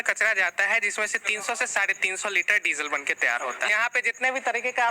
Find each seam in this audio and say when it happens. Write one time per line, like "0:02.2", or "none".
0:03.7